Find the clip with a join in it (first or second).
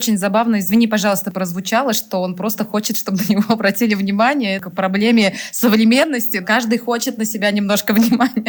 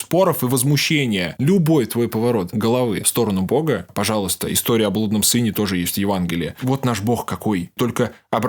second